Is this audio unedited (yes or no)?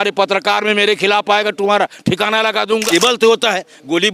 no